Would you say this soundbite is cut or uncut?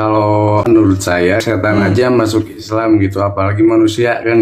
cut